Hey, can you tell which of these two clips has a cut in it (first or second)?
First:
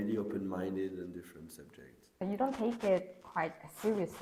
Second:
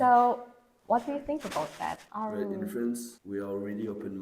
second